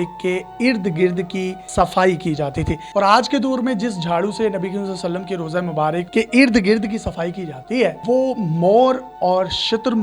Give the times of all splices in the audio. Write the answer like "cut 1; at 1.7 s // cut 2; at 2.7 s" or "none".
cut 1; at 2.8 s // cut 2; at 6.1 s // cut 3; at 8.0 s

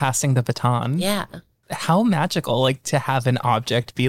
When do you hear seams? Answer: cut 1; at 1.6 s

